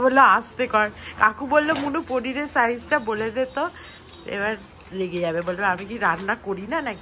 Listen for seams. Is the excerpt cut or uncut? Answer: uncut